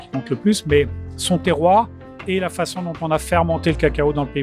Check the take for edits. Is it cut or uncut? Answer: uncut